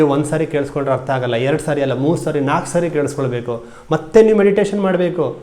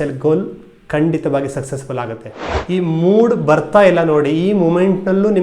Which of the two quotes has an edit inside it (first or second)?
second